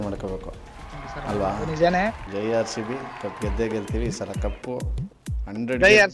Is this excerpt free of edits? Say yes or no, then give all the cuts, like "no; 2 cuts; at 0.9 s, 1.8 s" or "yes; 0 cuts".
no; 1 cut; at 2.2 s